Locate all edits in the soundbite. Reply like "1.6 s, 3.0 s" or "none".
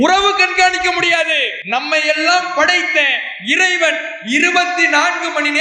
1.5 s